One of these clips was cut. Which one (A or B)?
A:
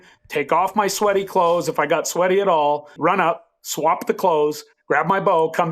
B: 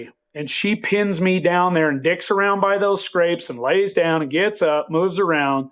A